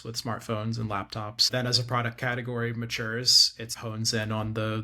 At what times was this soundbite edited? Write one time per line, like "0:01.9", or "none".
0:01.5
0:03.7